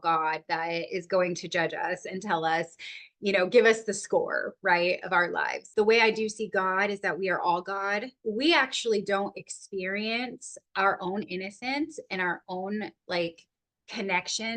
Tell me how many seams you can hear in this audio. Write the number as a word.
two